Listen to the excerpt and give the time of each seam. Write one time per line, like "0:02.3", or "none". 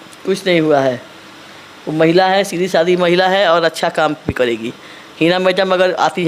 none

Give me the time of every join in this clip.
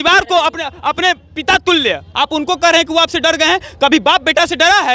0:02.0

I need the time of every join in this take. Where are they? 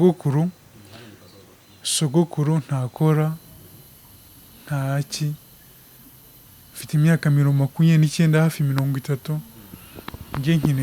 none

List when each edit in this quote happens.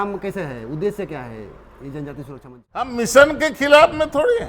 0:02.9

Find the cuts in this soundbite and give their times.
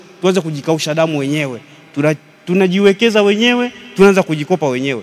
none

